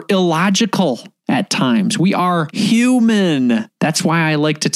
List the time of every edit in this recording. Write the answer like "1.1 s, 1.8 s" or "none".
1.1 s, 2.5 s, 3.7 s